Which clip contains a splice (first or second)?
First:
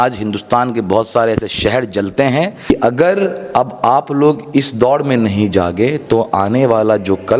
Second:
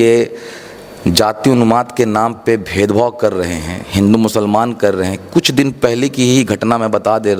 first